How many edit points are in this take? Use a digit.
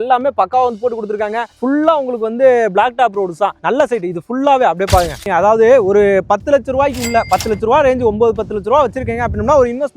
1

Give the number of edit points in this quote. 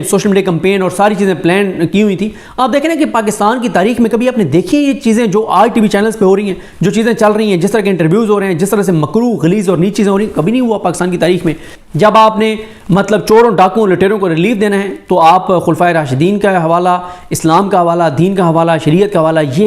2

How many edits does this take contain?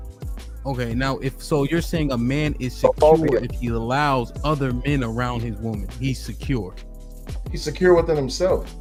0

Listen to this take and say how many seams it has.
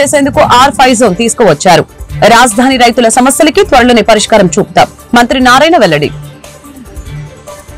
1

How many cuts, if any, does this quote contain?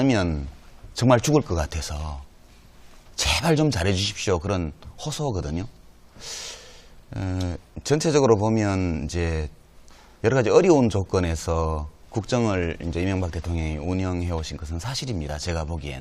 1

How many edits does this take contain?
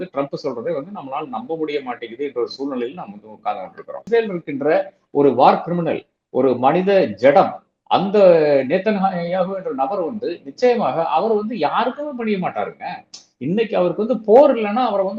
1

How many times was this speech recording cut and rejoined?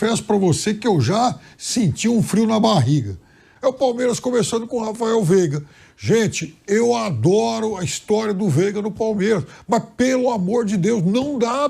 1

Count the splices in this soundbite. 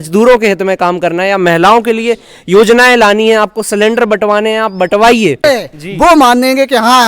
1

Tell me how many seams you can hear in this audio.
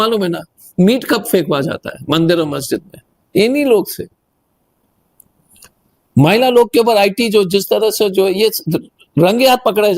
0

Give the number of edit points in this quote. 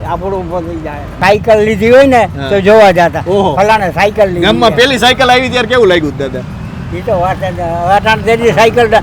1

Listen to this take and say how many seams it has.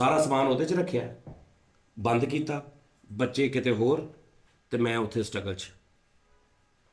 0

